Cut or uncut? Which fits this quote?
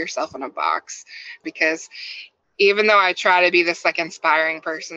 cut